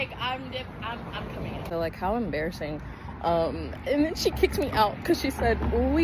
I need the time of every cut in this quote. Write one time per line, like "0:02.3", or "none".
0:01.6